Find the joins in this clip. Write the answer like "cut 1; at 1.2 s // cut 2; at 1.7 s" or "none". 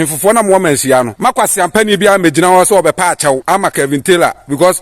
cut 1; at 1.1 s // cut 2; at 3.4 s